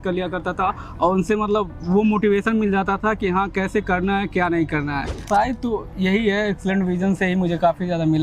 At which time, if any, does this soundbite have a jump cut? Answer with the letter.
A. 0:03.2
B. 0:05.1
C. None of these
B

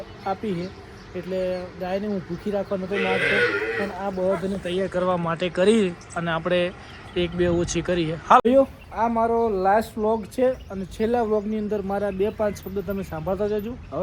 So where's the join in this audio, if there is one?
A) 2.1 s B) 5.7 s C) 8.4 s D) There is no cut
C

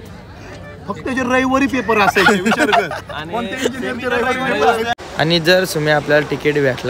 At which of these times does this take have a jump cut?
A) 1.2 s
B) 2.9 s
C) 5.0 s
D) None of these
C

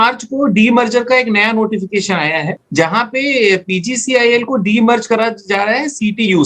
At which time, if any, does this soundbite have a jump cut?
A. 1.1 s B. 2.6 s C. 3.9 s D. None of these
B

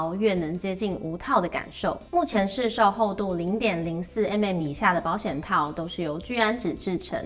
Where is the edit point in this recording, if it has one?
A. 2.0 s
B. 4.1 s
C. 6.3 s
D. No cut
A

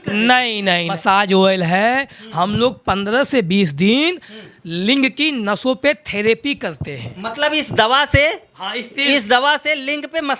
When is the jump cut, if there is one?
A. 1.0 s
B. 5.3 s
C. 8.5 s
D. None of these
A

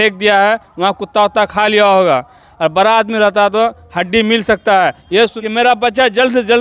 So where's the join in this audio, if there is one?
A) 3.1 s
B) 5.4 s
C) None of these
B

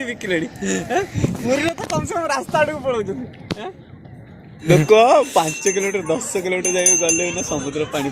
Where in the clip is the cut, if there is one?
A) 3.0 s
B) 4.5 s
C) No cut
B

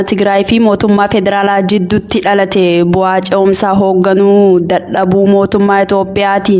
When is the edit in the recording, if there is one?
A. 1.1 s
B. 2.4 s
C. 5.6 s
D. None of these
A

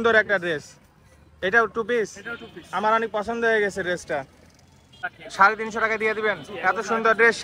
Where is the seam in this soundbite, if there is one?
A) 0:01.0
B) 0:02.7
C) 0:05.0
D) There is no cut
C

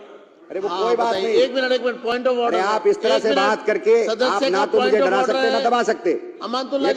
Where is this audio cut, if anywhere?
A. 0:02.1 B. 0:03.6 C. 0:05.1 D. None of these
D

